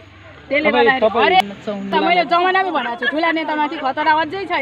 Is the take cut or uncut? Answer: cut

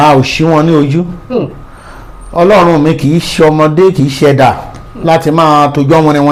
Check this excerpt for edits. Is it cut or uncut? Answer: uncut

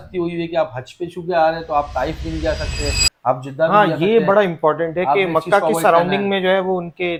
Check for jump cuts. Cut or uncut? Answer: uncut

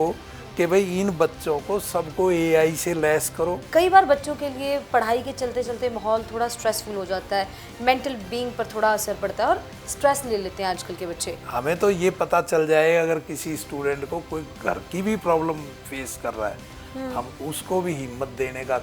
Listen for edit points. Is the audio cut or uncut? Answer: cut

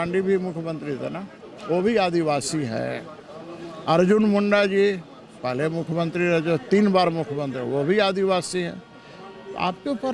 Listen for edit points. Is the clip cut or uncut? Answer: uncut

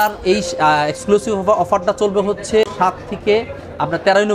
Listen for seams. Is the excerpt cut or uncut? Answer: uncut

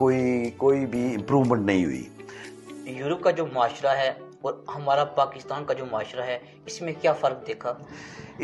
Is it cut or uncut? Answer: cut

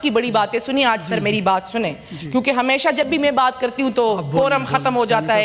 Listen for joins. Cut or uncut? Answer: uncut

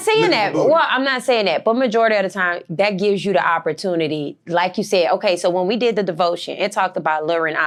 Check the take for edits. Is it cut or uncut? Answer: uncut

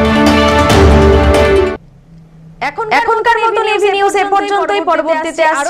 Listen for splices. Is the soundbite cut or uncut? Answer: uncut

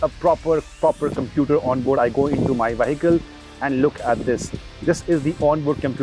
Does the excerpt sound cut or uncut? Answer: uncut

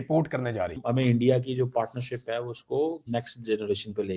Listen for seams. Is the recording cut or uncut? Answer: cut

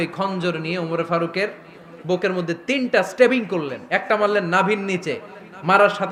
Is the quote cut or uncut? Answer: uncut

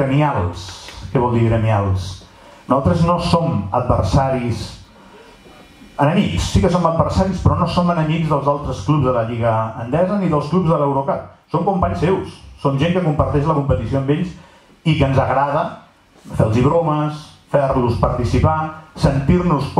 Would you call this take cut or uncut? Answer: uncut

